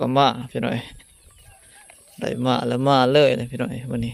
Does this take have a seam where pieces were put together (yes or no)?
no